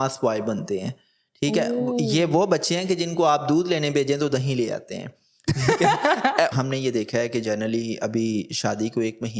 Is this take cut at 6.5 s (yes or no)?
yes